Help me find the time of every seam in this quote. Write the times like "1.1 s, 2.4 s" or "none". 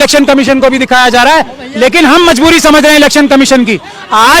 1.6 s